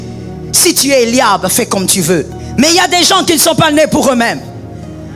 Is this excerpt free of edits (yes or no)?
no